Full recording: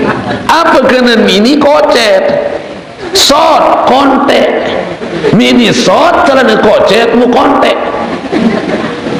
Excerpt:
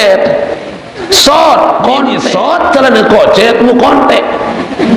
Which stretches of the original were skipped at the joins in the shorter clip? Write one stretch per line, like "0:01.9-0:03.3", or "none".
0:04.2-0:05.7